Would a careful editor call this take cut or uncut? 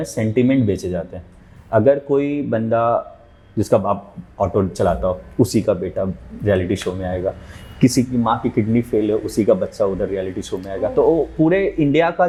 uncut